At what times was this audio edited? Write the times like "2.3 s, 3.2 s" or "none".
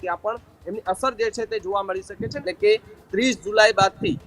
2.4 s